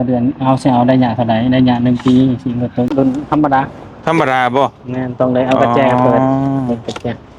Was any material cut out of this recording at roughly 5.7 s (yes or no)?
no